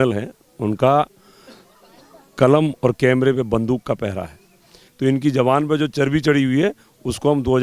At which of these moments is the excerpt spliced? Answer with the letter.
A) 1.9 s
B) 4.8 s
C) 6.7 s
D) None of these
B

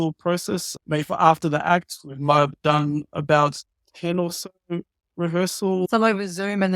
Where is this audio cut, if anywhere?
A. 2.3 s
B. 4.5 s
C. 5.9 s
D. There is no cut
C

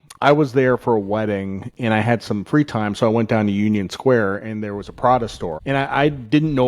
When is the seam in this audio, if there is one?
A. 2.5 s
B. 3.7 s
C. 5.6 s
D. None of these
C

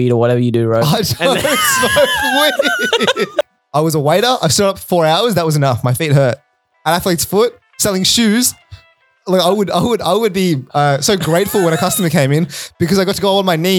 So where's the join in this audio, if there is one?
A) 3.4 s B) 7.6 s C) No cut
A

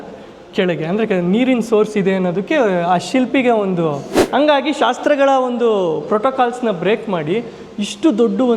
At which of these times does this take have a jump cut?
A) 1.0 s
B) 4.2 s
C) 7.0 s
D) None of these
B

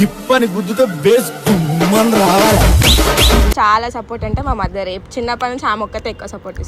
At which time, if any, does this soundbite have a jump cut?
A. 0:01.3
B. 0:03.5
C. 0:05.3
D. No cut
B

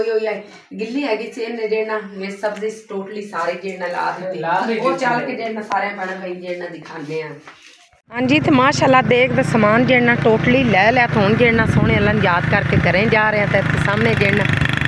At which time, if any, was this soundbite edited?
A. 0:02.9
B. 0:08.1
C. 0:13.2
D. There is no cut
B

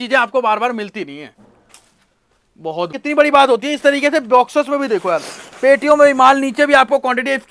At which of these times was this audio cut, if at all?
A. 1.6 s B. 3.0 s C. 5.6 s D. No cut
B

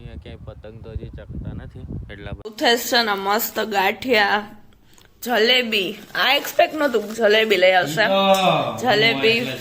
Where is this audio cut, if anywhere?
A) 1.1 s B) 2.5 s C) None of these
B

